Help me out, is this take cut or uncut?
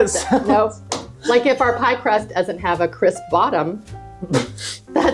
uncut